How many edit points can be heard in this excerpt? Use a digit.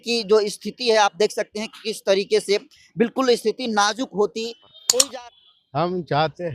1